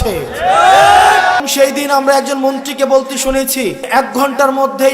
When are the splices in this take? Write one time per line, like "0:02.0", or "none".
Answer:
0:01.4
0:03.9